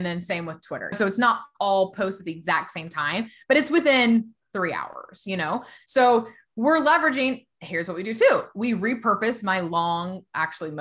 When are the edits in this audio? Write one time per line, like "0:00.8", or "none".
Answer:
0:00.9